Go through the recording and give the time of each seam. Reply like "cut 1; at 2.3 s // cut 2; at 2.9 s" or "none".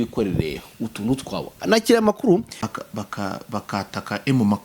cut 1; at 2.6 s